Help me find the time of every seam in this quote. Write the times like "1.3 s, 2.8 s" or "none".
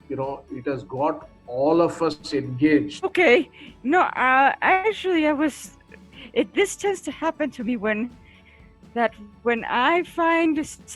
3.1 s